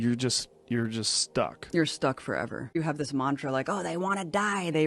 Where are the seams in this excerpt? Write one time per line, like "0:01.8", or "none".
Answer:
0:02.8